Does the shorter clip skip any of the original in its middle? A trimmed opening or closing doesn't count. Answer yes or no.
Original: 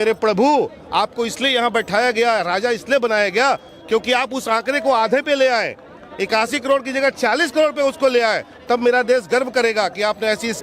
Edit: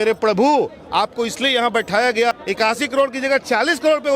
yes